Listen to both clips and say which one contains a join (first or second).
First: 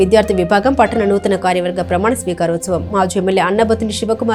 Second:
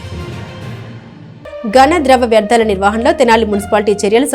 second